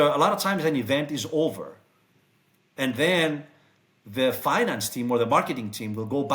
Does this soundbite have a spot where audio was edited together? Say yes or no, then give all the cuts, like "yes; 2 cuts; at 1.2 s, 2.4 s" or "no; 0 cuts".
no; 0 cuts